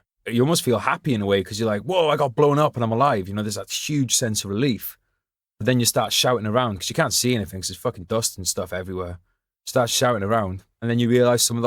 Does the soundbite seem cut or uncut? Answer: uncut